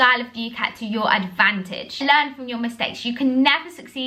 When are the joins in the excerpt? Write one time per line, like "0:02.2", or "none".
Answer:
0:02.0